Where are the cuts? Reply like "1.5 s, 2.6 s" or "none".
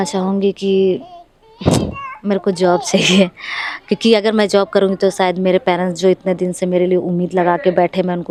none